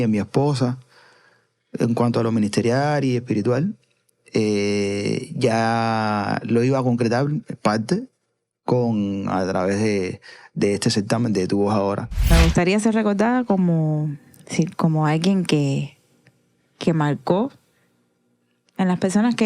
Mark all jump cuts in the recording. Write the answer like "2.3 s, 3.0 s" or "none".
12.3 s